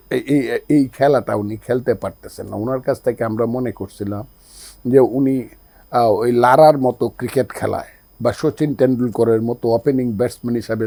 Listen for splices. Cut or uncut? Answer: uncut